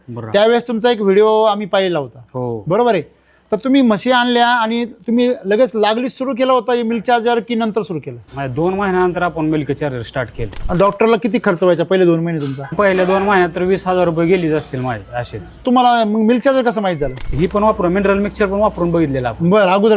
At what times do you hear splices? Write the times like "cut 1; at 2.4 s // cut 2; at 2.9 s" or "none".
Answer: cut 1; at 10.6 s // cut 2; at 12.7 s // cut 3; at 15.6 s // cut 4; at 17.2 s